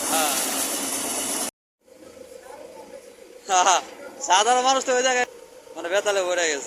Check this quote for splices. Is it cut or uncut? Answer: cut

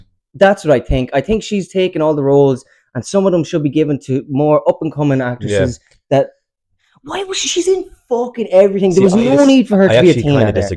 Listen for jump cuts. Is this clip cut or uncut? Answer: uncut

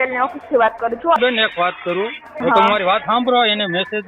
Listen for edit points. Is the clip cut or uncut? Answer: cut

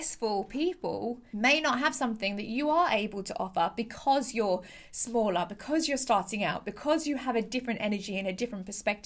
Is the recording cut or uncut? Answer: cut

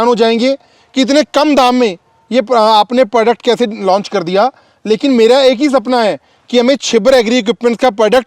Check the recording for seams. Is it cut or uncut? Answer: uncut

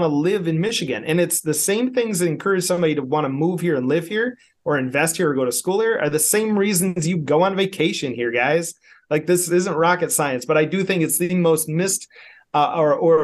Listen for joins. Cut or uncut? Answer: uncut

